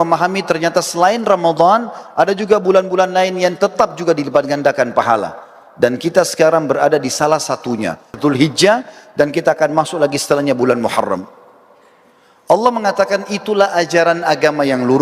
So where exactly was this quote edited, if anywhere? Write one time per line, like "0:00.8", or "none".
0:08.2